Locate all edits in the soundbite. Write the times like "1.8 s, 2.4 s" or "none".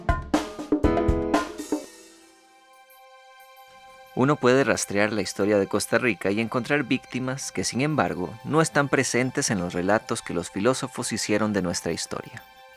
10.9 s